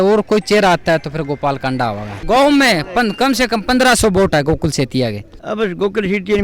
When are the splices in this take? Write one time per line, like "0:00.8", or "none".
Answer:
0:02.2
0:05.3